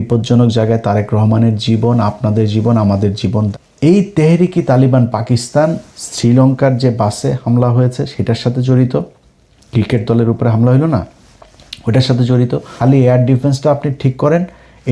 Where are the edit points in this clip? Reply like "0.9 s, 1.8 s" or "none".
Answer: 3.5 s, 12.7 s